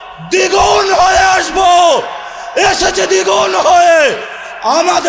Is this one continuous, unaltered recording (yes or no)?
yes